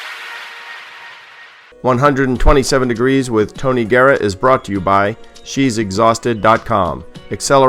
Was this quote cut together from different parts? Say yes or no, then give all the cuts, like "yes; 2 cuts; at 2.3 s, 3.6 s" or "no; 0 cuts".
yes; 1 cut; at 1.6 s